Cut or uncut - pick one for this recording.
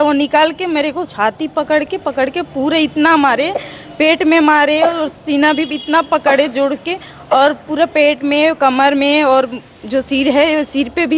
uncut